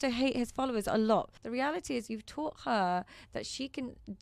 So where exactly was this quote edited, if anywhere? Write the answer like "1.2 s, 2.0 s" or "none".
1.4 s